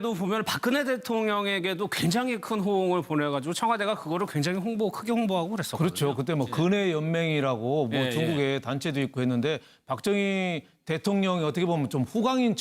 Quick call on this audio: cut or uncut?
cut